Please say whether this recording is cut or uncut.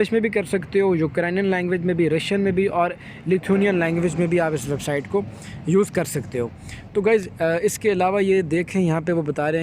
uncut